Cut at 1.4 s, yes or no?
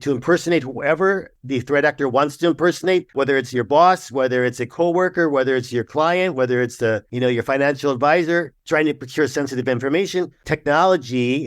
yes